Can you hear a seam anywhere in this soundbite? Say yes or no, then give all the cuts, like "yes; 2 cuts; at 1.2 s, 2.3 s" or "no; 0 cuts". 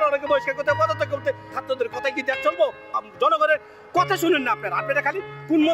yes; 2 cuts; at 1.5 s, 2.9 s